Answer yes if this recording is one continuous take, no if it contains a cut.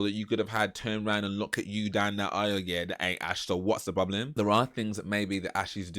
no